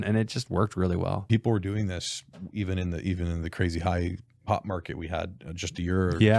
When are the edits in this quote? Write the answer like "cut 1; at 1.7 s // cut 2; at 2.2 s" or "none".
cut 1; at 1.2 s